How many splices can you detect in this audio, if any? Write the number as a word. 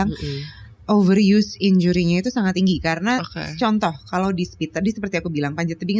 zero